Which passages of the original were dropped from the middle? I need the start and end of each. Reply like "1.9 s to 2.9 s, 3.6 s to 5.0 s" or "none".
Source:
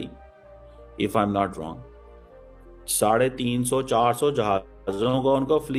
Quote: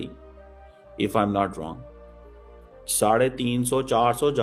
none